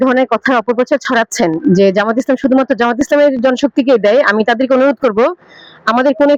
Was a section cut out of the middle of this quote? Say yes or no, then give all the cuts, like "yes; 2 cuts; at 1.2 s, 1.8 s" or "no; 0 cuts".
no; 0 cuts